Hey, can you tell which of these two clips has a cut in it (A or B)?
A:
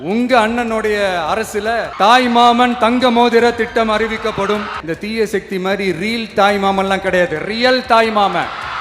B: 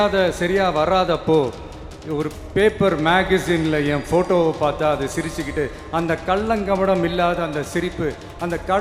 A